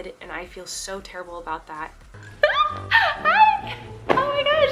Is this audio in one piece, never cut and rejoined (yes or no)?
yes